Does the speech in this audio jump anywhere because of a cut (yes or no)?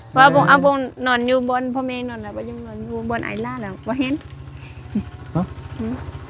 no